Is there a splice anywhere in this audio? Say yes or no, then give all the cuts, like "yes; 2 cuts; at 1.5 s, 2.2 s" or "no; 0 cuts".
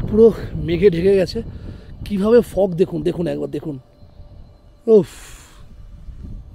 no; 0 cuts